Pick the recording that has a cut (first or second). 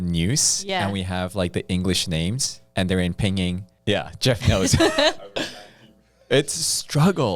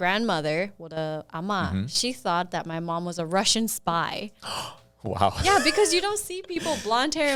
first